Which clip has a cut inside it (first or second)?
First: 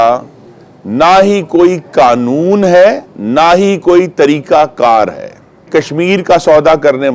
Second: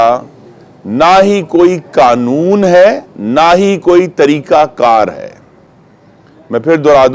first